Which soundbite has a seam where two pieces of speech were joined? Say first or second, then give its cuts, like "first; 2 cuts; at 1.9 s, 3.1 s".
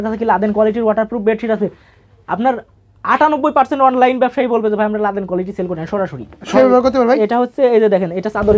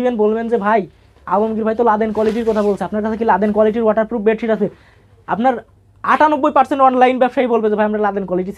first; 1 cut; at 6.5 s